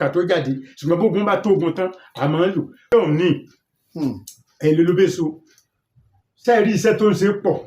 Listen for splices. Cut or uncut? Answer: cut